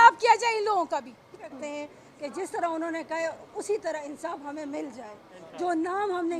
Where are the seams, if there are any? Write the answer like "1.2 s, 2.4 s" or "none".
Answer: 1.5 s